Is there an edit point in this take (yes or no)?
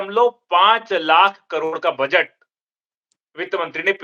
no